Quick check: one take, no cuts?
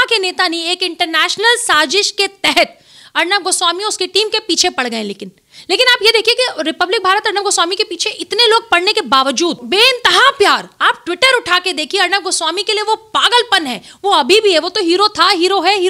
yes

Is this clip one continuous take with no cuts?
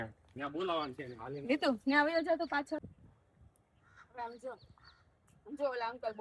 no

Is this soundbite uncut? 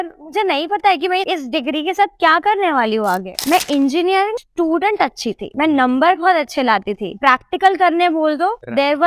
no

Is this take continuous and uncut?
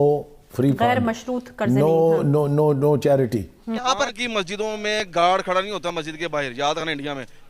no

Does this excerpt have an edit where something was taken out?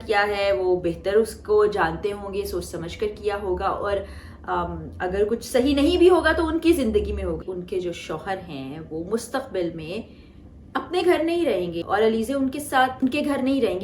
yes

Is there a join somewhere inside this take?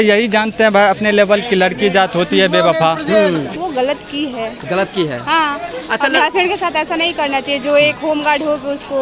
yes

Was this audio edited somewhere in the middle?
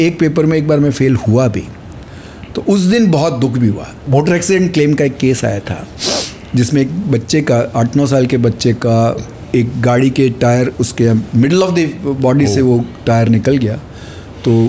yes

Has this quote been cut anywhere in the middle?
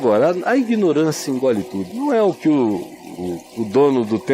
yes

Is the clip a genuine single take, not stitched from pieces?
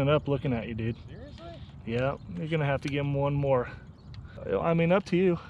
no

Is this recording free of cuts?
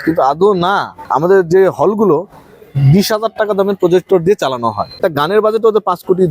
no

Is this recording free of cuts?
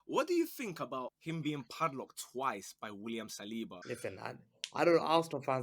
no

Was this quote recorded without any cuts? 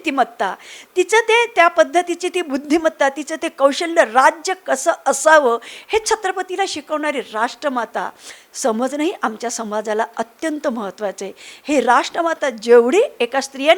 yes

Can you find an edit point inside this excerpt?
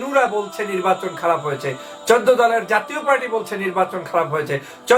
no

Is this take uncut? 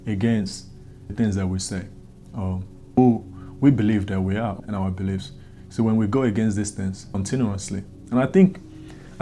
no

